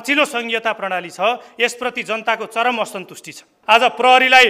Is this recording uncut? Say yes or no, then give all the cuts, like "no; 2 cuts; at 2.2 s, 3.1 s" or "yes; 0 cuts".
no; 1 cut; at 3.5 s